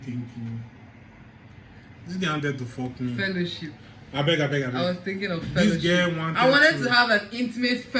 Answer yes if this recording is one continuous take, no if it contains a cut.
yes